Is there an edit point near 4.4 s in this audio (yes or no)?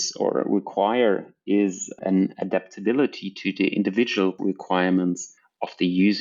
yes